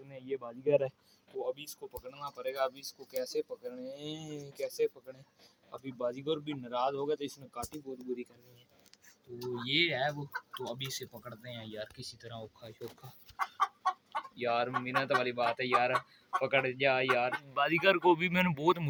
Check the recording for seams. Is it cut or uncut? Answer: uncut